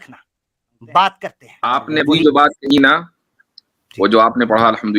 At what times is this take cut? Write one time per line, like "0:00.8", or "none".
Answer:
0:01.6